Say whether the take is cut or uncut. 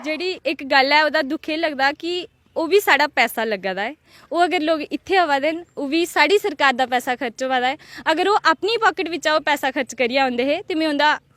uncut